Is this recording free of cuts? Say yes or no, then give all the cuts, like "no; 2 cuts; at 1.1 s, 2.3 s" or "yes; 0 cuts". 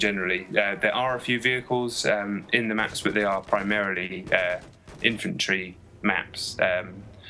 no; 1 cut; at 1.8 s